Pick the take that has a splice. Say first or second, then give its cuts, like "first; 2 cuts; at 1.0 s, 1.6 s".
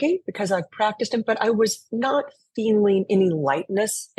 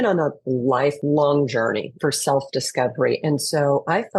second; 2 cuts; at 1.0 s, 1.9 s